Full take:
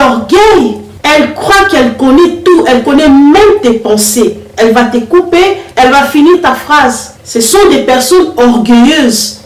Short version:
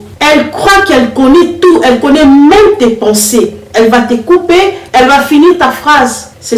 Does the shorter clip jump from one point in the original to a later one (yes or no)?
no